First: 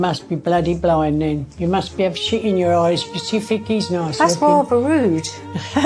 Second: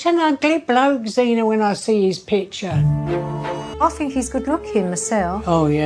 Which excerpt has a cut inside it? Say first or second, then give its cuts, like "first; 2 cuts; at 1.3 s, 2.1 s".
second; 1 cut; at 3.7 s